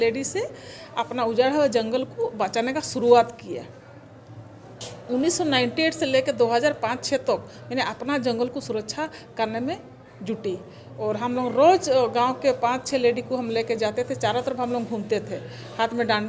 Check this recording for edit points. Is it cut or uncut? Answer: uncut